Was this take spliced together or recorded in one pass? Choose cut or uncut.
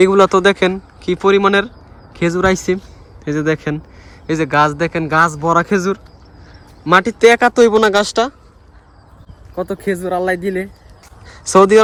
uncut